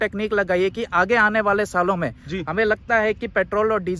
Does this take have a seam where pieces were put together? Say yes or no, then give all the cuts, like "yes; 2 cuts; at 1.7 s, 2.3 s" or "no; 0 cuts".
no; 0 cuts